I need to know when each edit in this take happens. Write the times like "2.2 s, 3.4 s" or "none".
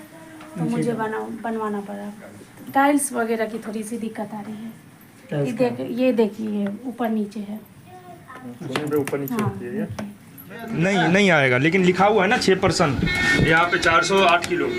2.3 s, 10.7 s